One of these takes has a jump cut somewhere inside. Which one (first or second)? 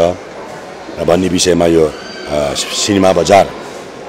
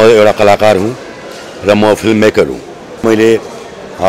second